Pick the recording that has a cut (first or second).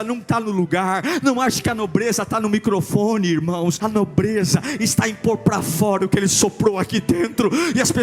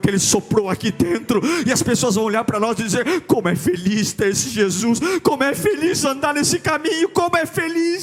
first